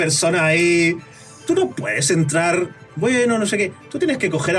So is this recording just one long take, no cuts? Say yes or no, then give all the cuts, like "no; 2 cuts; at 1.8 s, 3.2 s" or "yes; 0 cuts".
yes; 0 cuts